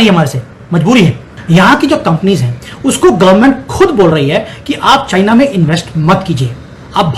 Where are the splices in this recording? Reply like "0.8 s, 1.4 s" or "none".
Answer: 1.3 s